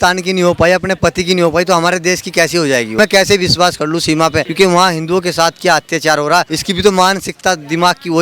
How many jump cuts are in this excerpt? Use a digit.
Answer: 3